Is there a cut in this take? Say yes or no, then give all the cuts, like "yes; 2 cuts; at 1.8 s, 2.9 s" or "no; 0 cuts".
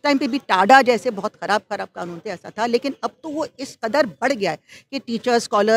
no; 0 cuts